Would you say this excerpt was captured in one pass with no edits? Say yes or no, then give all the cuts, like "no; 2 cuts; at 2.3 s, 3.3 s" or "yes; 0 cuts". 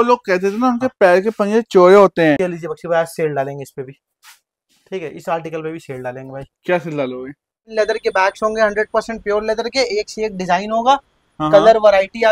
no; 2 cuts; at 2.4 s, 7.7 s